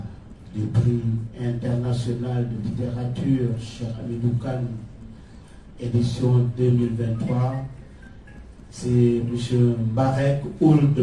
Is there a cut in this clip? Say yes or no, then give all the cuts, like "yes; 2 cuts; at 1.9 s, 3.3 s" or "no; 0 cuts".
no; 0 cuts